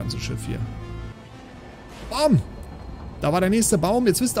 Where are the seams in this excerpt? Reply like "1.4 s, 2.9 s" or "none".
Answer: 1.1 s

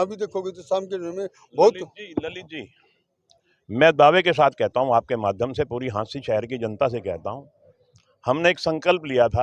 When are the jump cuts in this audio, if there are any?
none

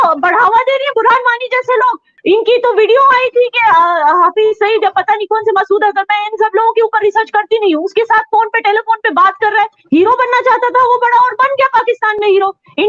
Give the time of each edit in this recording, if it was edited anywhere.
2.0 s

